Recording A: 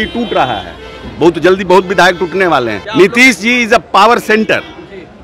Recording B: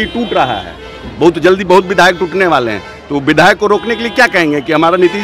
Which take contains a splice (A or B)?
A